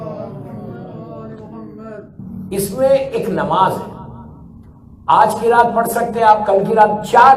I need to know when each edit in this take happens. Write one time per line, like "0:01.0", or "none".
0:02.2